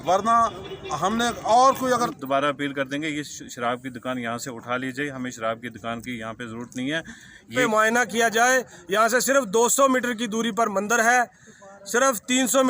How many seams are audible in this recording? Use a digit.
2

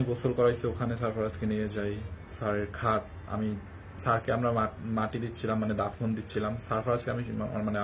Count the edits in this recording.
1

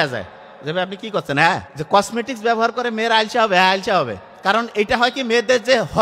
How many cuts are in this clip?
1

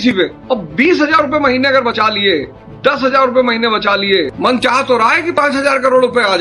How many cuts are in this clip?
1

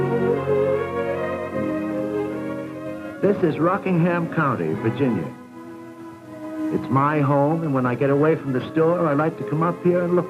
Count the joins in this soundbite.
1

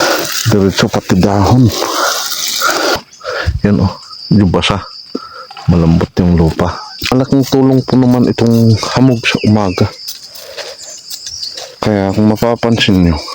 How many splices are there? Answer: 2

